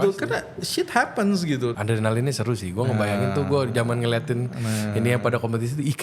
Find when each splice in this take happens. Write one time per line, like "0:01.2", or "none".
0:01.7